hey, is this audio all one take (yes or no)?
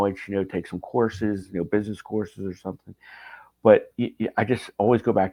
yes